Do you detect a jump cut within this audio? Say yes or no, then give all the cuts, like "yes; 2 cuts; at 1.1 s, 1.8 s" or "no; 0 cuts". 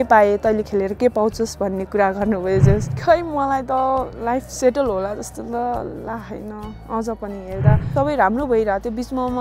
yes; 2 cuts; at 2.9 s, 7.9 s